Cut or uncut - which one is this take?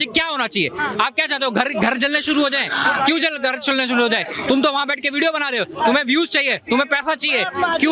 uncut